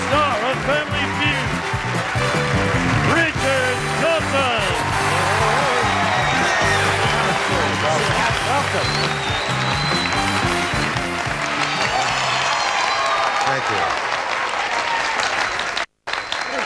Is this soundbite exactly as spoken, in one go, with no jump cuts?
yes; 0 cuts

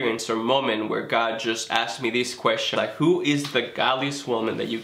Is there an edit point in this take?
yes; 1 cut; at 2.7 s

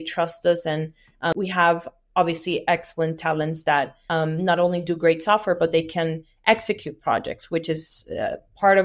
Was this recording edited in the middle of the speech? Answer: yes; 2 cuts; at 1.3 s, 4.0 s

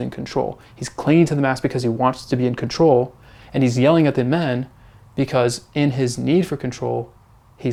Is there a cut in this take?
no; 0 cuts

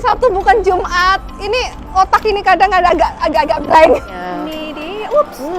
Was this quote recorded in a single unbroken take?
no; 1 cut; at 4.1 s

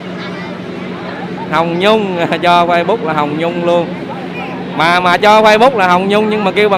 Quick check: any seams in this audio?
no; 0 cuts

